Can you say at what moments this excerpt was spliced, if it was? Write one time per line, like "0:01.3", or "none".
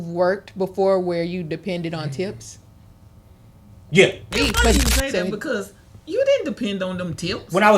0:04.7